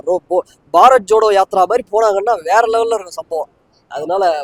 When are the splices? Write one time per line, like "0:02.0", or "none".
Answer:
none